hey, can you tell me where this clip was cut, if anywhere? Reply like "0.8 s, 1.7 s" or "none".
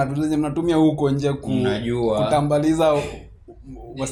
none